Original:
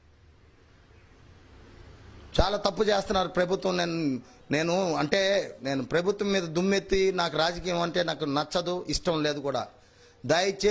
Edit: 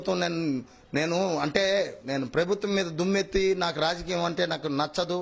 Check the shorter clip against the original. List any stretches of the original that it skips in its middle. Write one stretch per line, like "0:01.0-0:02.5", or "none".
none

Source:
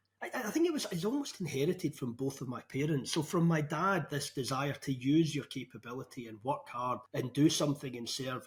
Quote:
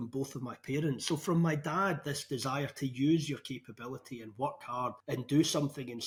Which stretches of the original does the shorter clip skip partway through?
none

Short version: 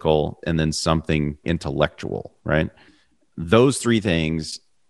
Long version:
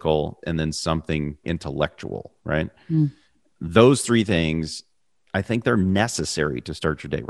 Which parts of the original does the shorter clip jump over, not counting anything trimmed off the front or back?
0:02.9-0:03.1

